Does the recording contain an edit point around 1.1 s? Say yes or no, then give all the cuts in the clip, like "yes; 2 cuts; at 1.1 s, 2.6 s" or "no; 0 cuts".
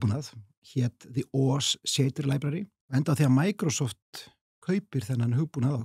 no; 1 cut; at 2.8 s